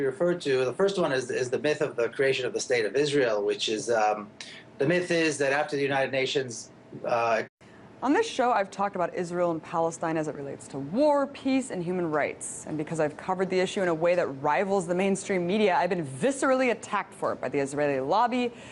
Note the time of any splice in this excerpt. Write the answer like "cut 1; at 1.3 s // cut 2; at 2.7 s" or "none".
none